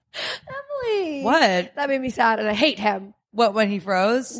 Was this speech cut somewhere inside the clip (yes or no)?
no